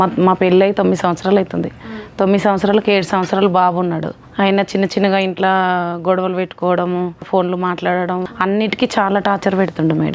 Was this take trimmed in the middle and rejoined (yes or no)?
yes